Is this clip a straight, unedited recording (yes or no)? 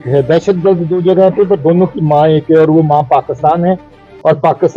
yes